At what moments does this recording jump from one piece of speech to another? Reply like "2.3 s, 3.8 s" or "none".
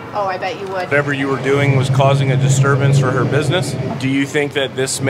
0.9 s, 3.9 s